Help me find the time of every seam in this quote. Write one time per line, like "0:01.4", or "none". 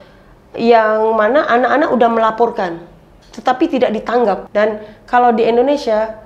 0:04.4